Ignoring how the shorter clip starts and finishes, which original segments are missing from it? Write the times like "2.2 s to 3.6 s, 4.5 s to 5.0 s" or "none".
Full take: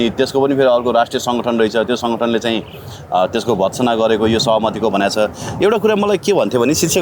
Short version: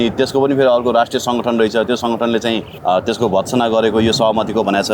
2.7 s to 3.0 s